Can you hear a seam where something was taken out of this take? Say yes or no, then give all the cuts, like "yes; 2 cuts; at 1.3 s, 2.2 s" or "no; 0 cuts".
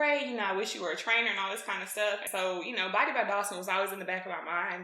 yes; 1 cut; at 2.2 s